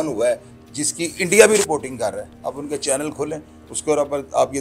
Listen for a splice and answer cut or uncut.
uncut